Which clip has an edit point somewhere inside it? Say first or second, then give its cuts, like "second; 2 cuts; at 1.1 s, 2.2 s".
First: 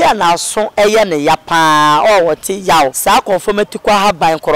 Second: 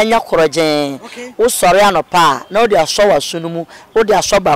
first; 1 cut; at 3.0 s